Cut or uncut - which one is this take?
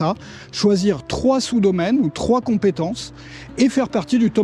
uncut